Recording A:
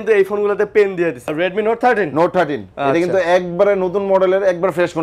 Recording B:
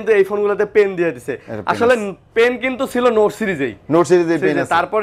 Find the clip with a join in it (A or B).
A